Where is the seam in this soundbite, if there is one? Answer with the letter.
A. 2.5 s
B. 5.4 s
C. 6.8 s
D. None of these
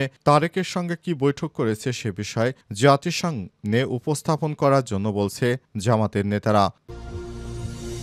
C